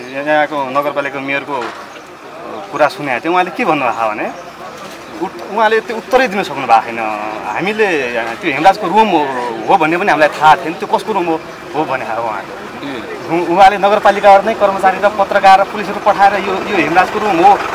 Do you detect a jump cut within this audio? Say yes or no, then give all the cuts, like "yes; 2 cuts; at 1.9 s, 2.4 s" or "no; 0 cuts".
no; 0 cuts